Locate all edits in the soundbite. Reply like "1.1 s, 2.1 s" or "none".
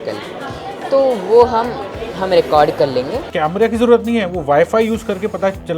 3.2 s